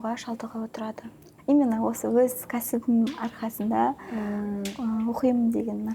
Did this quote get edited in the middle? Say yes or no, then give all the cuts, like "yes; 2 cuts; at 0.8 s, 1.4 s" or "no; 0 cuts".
yes; 1 cut; at 1.3 s